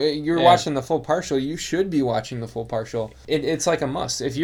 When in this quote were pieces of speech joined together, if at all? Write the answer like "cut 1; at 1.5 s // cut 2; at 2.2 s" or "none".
cut 1; at 3.2 s